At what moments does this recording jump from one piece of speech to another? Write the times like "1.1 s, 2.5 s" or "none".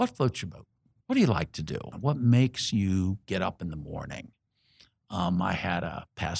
1.9 s